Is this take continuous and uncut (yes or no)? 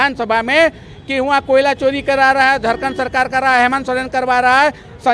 yes